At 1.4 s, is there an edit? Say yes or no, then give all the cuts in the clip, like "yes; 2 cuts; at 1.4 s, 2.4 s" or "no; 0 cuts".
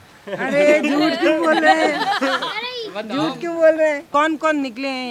no; 1 cut; at 4.1 s